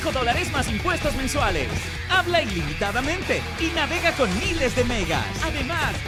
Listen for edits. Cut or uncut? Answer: uncut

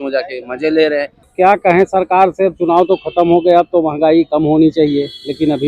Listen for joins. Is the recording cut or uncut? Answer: cut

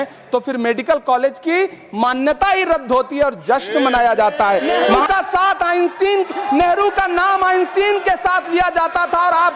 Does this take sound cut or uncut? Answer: cut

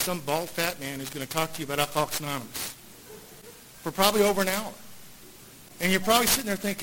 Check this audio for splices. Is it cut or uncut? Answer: uncut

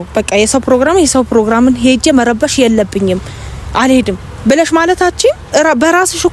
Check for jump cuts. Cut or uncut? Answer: uncut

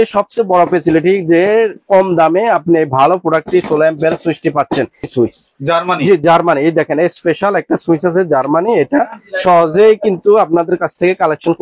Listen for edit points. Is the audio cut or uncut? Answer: cut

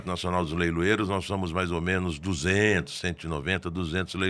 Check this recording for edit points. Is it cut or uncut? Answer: uncut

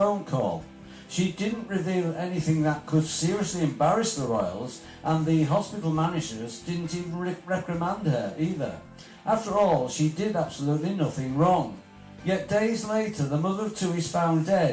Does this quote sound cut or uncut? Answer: cut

